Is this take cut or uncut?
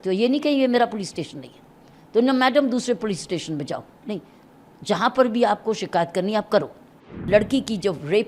cut